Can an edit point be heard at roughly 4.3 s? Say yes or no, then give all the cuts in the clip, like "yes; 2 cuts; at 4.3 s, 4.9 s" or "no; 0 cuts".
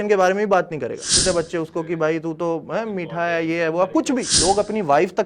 yes; 2 cuts; at 1.2 s, 4.3 s